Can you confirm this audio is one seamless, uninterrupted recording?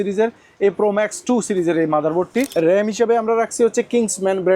no; 1 cut; at 2.5 s

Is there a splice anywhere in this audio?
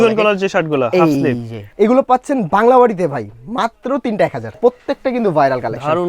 yes; 2 cuts; at 1.6 s, 4.6 s

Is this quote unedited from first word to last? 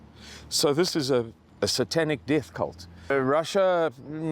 no; 1 cut; at 3.1 s

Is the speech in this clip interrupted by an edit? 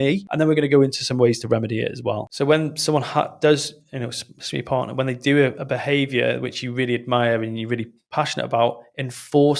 yes; 1 cut; at 2.3 s

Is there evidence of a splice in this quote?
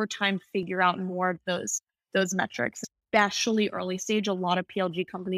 yes; 1 cut; at 2.8 s

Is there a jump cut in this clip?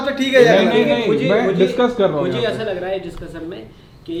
no; 0 cuts

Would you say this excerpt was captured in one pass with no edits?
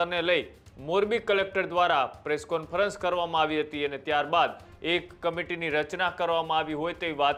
yes; 0 cuts

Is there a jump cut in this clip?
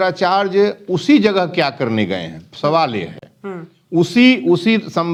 no; 0 cuts

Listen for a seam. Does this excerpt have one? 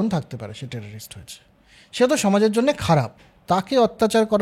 yes; 1 cut; at 3.2 s

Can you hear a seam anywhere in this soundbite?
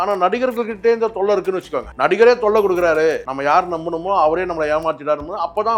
yes; 2 cuts; at 1.8 s, 3.3 s

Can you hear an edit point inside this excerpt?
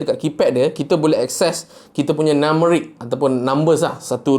no; 0 cuts

